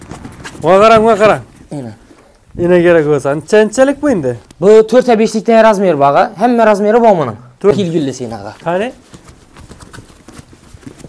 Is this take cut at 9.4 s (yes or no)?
no